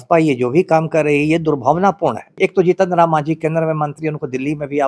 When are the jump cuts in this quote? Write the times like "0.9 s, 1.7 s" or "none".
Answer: 2.3 s